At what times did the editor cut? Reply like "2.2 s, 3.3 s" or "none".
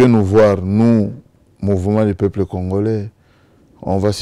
none